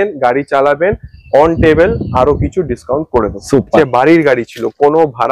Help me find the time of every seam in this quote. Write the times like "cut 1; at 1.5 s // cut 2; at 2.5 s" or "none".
cut 1; at 3.8 s